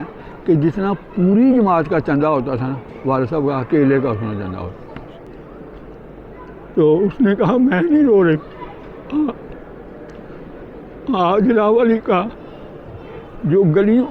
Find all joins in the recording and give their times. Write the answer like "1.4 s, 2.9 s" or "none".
5.3 s

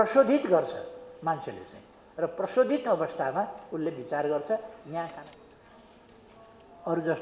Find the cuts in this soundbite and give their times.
5.1 s

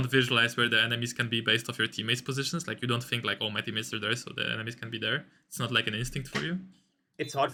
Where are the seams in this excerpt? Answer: none

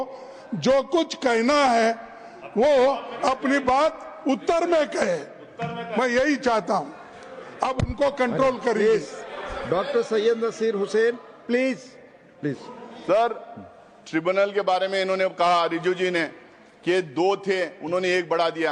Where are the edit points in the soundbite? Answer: none

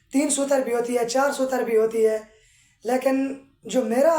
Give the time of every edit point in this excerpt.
none

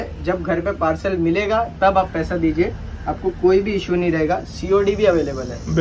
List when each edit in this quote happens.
none

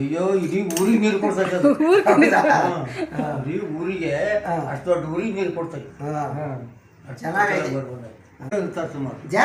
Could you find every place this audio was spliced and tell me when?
8.5 s

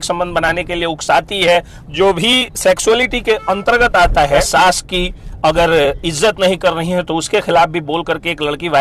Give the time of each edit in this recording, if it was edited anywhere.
1.8 s, 4.5 s

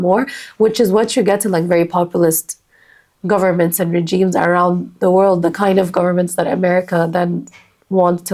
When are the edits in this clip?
none

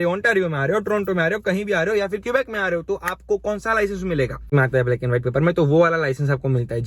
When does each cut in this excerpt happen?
4.5 s

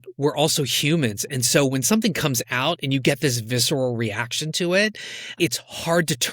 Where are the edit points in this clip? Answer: 5.2 s

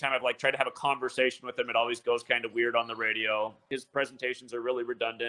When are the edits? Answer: 3.6 s

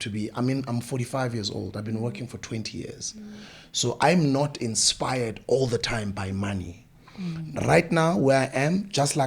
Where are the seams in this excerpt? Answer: none

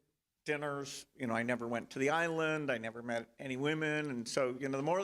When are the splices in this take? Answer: 1.8 s, 2.9 s

